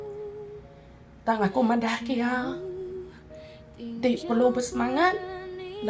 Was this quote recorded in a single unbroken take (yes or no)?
no